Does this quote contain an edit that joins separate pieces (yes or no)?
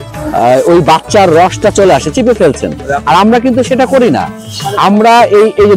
no